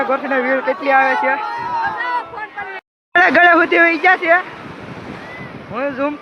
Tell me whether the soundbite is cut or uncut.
cut